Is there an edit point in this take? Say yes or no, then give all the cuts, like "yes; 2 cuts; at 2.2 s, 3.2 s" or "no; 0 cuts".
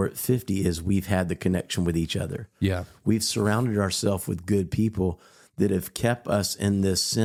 no; 0 cuts